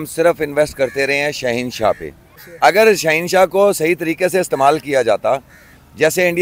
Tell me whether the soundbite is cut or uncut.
cut